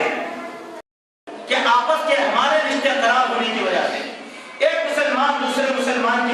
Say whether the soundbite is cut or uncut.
cut